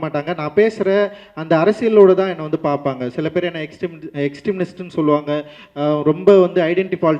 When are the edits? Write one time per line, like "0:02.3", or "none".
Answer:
none